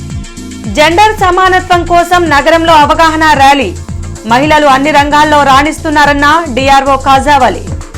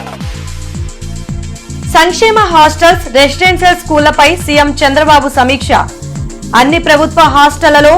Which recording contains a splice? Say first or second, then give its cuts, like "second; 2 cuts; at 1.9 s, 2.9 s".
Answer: second; 2 cuts; at 0.8 s, 1.8 s